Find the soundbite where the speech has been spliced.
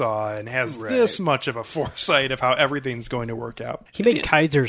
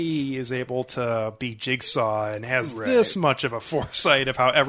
first; 1 cut; at 3.7 s

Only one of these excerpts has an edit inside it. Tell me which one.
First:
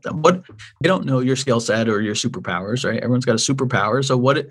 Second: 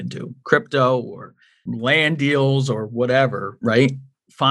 second; 1 cut; at 1.7 s

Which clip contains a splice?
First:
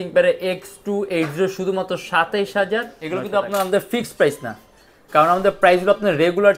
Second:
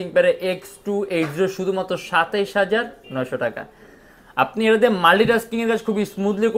first; 1 cut; at 3.0 s

